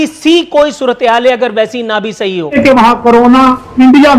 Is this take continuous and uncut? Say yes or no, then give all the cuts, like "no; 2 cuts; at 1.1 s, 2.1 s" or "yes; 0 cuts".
no; 1 cut; at 2.6 s